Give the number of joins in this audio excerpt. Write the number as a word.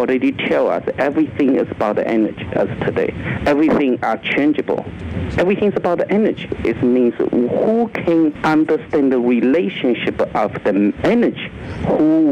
four